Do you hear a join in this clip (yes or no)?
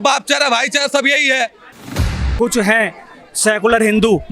yes